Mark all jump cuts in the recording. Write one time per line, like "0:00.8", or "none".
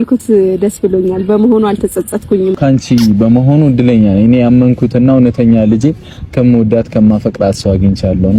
0:02.6